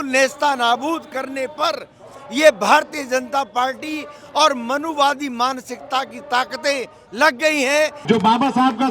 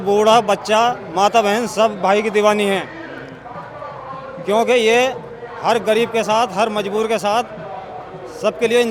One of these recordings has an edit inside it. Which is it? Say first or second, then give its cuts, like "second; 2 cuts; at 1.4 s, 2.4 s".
first; 1 cut; at 8.0 s